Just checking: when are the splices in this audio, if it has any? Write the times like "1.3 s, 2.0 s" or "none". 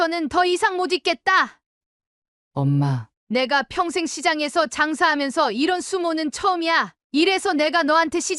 none